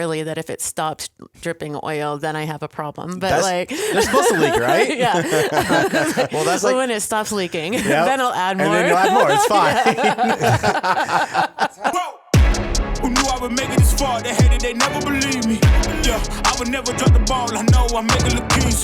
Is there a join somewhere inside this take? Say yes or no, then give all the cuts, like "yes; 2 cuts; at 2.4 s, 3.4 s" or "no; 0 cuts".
yes; 1 cut; at 11.8 s